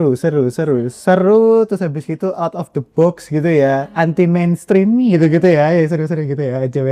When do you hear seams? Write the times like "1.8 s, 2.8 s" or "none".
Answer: none